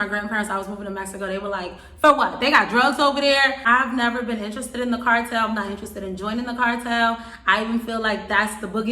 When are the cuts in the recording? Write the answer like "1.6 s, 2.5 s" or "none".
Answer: 3.6 s